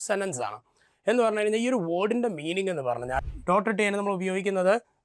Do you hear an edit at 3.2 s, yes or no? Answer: yes